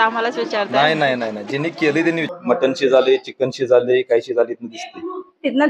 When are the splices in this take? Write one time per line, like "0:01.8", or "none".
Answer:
0:02.3